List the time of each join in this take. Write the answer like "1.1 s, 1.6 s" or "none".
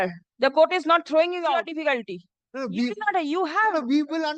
1.4 s